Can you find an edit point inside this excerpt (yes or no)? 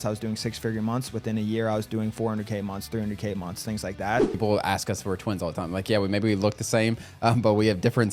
yes